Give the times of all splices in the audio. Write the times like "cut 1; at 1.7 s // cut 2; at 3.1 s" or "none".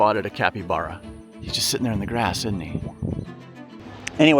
cut 1; at 1.0 s // cut 2; at 3.4 s